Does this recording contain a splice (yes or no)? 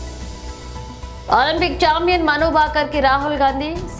yes